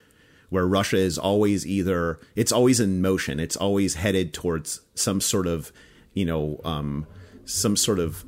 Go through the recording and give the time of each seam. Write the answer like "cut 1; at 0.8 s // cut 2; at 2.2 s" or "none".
none